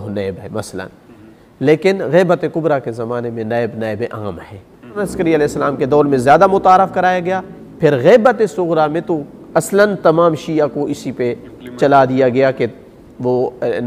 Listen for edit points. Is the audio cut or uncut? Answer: cut